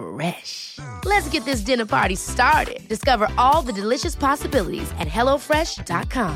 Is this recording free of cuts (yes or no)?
yes